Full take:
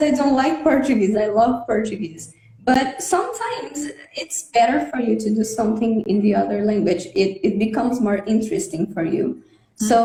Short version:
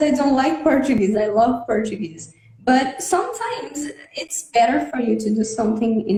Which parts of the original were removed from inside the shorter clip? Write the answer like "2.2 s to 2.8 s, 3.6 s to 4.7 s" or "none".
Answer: none